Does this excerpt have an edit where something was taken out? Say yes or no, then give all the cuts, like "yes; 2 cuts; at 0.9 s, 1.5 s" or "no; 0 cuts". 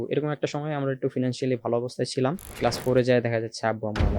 yes; 1 cut; at 2.5 s